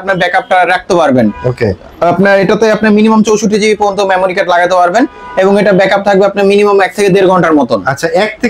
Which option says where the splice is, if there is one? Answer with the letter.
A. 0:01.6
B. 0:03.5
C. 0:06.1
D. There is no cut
D